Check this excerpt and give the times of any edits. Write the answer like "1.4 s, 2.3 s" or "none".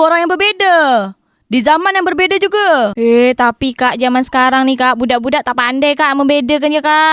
none